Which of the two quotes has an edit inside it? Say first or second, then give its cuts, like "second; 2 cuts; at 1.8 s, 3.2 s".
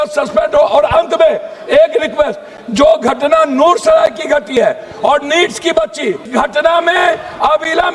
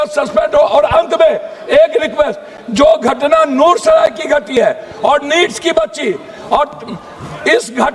first; 1 cut; at 6.2 s